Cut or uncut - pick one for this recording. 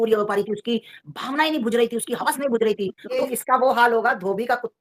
cut